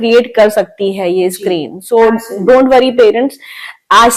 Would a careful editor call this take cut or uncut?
uncut